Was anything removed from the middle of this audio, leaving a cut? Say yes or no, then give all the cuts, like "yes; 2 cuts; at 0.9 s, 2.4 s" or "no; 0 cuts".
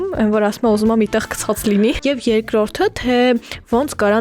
yes; 1 cut; at 2.0 s